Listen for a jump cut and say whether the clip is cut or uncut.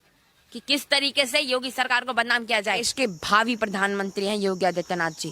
cut